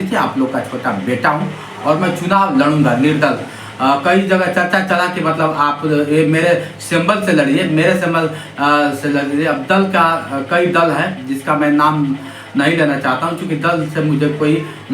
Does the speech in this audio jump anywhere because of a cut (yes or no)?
no